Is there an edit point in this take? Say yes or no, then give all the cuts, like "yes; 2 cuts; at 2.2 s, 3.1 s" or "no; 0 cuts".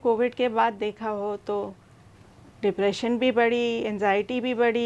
no; 0 cuts